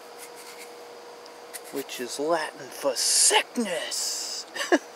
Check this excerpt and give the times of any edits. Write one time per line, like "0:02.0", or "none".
none